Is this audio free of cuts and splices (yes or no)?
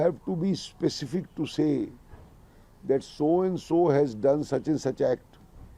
yes